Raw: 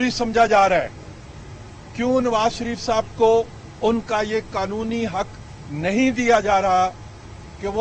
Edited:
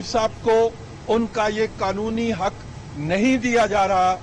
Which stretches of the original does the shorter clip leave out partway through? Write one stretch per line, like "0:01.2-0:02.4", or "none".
none